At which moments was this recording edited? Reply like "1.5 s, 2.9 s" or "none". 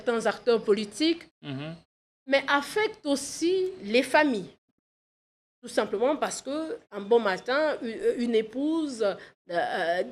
none